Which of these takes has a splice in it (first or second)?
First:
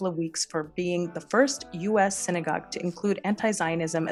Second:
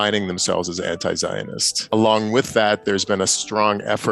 second